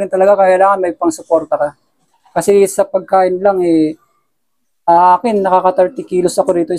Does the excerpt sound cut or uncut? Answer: uncut